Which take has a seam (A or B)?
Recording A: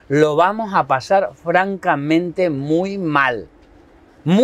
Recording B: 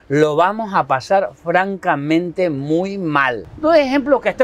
B